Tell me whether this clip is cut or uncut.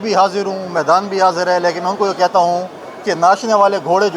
uncut